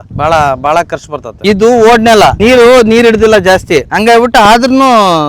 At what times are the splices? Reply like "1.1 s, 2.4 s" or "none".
1.4 s